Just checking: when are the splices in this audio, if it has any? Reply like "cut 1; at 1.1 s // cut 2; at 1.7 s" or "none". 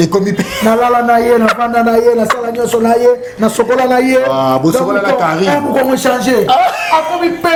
none

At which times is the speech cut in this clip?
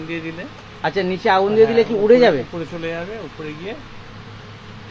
none

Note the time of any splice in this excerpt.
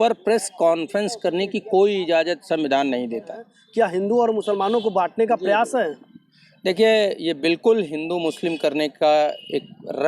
cut 1; at 3.6 s

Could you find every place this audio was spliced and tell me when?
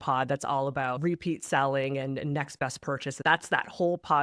cut 1; at 1.0 s // cut 2; at 3.2 s

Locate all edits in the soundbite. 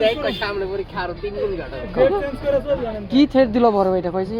none

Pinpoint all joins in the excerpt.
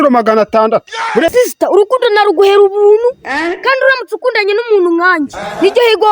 cut 1; at 1.3 s

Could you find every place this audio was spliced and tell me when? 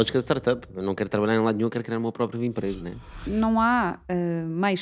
cut 1; at 3.2 s

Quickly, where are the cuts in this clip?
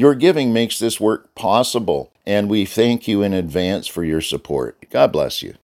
cut 1; at 2.1 s // cut 2; at 4.8 s

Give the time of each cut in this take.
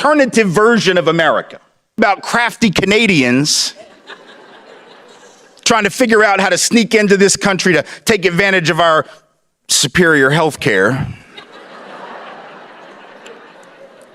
cut 1; at 2.0 s

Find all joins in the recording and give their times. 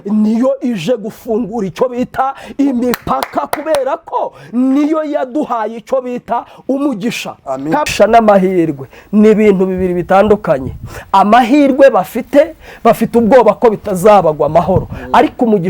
cut 1; at 7.9 s

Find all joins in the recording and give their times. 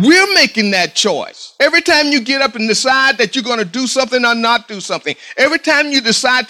cut 1; at 1.4 s

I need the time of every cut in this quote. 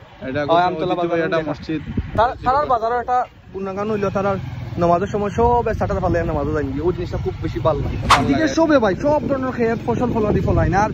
cut 1; at 2.1 s // cut 2; at 8.2 s

